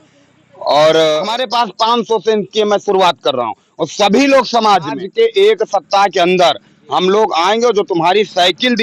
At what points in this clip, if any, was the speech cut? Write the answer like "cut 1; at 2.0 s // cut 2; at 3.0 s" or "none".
cut 1; at 1.4 s // cut 2; at 5.0 s